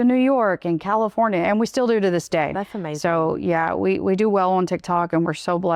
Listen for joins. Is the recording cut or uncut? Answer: uncut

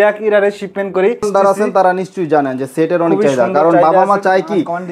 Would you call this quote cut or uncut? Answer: cut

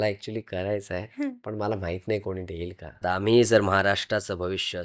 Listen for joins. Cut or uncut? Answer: cut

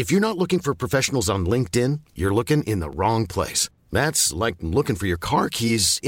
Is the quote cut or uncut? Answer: uncut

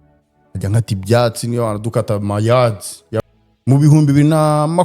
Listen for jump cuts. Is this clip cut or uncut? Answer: cut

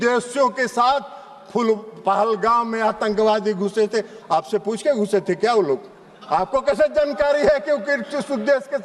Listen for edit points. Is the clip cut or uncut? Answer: uncut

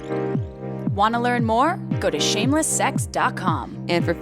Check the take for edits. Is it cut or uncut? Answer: cut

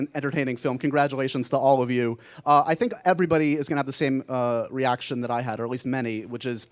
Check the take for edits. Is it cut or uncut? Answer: uncut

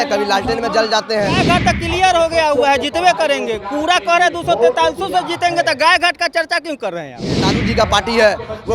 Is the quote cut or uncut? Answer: cut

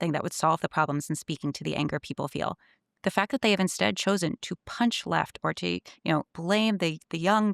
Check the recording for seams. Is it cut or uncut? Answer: uncut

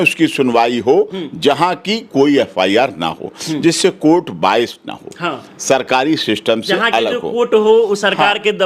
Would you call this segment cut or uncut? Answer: uncut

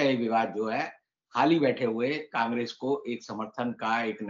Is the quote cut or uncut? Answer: uncut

